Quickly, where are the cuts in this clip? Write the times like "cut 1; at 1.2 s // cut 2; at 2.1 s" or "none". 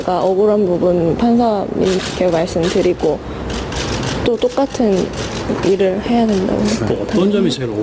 cut 1; at 3.6 s